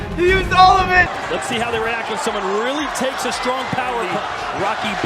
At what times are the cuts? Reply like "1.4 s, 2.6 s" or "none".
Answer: 1.1 s